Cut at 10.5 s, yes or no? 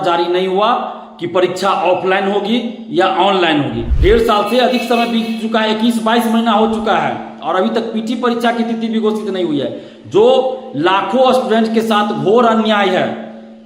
no